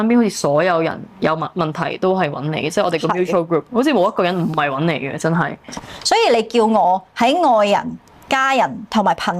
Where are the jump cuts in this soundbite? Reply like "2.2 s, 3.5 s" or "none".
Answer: 5.8 s